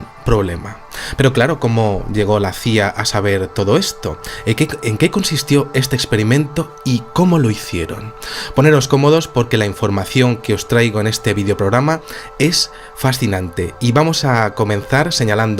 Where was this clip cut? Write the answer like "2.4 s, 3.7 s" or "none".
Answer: 3.5 s